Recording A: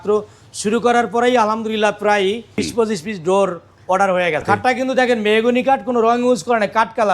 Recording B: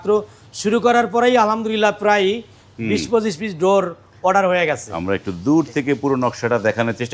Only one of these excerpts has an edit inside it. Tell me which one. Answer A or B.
A